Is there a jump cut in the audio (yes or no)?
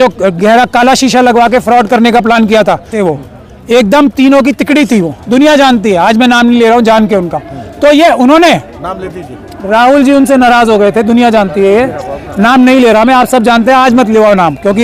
yes